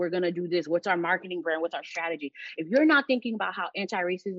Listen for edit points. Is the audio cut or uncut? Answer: uncut